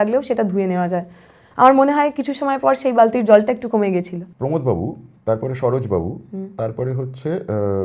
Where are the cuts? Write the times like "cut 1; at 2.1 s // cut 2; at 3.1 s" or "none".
cut 1; at 4.2 s